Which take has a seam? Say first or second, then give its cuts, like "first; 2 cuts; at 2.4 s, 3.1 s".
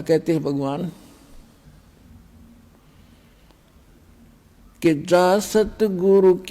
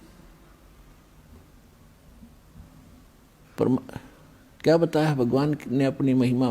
first; 1 cut; at 1.3 s